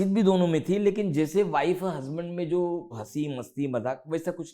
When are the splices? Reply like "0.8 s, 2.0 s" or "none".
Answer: 3.0 s